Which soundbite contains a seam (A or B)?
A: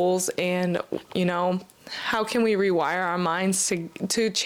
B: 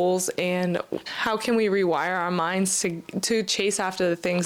B